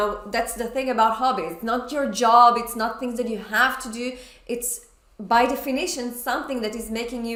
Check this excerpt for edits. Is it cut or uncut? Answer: uncut